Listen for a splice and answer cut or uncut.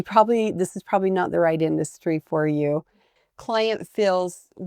cut